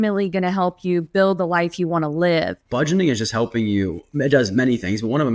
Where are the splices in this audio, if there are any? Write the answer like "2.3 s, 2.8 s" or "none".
2.7 s